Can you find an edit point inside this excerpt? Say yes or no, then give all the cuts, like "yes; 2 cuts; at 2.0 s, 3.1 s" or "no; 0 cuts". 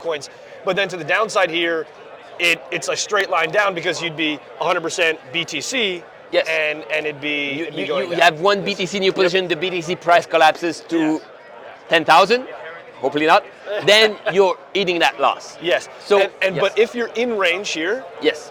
no; 0 cuts